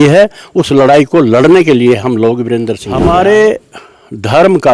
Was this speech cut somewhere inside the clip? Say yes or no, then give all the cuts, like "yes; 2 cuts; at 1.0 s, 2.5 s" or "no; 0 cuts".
yes; 1 cut; at 2.8 s